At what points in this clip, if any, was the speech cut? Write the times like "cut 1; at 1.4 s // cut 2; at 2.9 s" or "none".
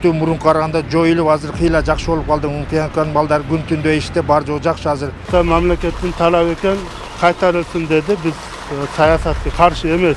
cut 1; at 5.3 s